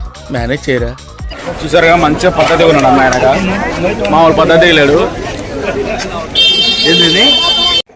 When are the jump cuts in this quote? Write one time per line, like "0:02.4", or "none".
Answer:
0:01.0